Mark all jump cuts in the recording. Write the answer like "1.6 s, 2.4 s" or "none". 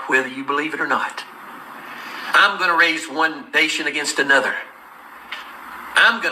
5.2 s